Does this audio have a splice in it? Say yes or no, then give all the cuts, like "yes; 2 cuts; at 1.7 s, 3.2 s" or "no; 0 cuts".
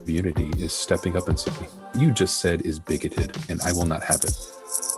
no; 0 cuts